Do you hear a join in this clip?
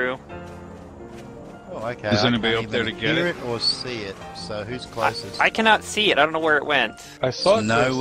yes; 1 cut; at 7.1 s

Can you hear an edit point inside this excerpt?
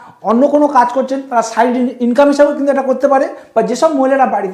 no; 0 cuts

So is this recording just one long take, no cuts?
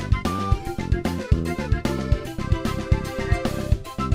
yes; 0 cuts

